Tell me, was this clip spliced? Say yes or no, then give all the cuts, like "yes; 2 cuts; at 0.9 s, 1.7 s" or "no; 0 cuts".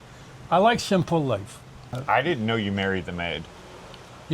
yes; 1 cut; at 2.0 s